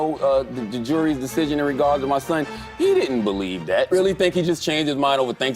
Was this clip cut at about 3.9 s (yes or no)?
yes